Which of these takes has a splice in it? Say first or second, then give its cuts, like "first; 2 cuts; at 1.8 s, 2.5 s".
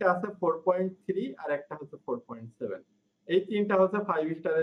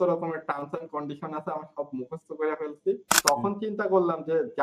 second; 1 cut; at 3.1 s